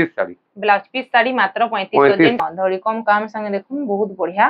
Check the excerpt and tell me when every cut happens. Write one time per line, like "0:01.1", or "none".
0:02.4